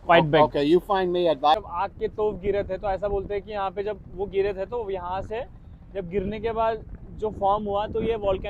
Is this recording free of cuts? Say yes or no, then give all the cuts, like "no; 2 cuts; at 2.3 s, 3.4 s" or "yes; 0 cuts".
no; 1 cut; at 1.6 s